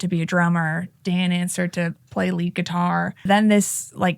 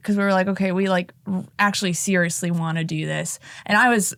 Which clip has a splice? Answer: first; 1 cut; at 3.2 s

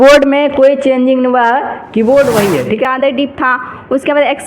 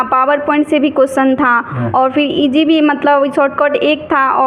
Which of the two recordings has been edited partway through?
first; 1 cut; at 2.9 s

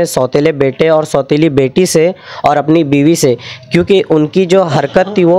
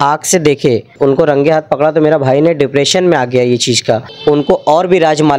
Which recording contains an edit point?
second; 2 cuts; at 0.9 s, 4.1 s

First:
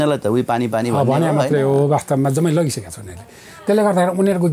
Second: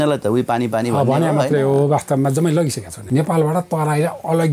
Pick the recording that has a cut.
second; 1 cut; at 2.9 s

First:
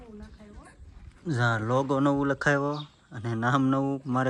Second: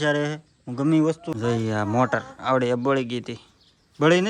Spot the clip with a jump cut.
second; 1 cut; at 1.2 s

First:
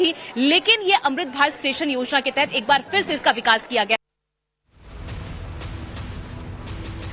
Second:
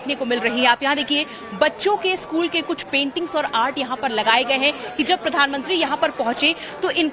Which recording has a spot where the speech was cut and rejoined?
second; 1 cut; at 5.4 s

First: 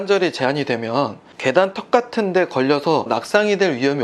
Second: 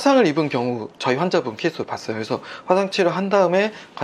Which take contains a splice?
first; 2 cuts; at 1.2 s, 3.1 s

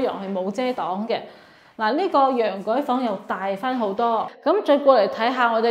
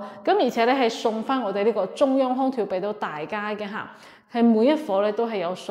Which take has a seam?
first; 1 cut; at 4.3 s

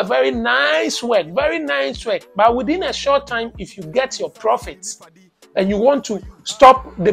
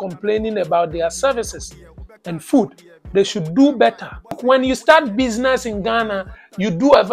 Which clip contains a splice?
second; 1 cut; at 4.4 s

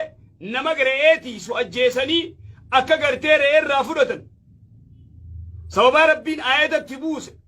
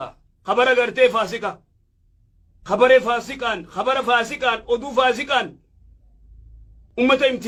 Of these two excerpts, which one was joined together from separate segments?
first; 1 cut; at 3.0 s

